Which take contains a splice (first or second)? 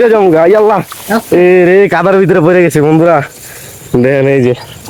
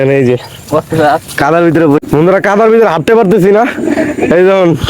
second